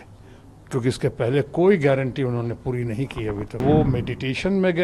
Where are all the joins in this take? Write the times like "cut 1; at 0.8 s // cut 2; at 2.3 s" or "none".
cut 1; at 3.6 s